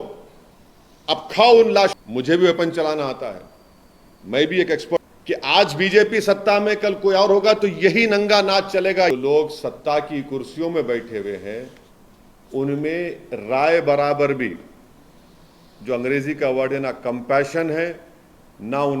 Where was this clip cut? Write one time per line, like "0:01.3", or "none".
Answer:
0:01.9
0:05.0
0:09.1